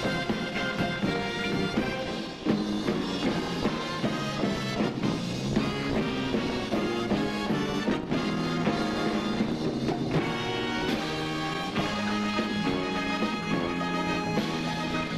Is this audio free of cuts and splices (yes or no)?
no